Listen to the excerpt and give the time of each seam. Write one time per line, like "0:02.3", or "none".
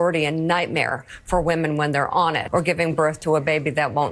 0:02.4